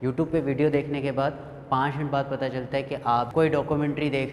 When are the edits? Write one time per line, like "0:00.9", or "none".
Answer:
0:03.3